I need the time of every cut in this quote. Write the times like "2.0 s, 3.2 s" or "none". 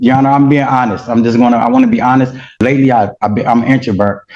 2.5 s